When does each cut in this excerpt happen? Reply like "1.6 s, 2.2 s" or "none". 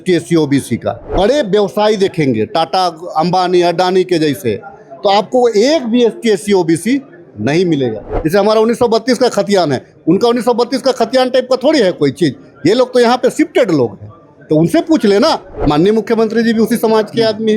1.1 s, 8.2 s, 15.5 s